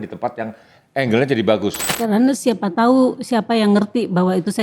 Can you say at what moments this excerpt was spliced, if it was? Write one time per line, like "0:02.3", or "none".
0:01.9